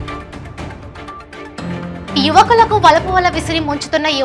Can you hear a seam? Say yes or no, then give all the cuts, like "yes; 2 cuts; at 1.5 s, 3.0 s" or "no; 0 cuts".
no; 0 cuts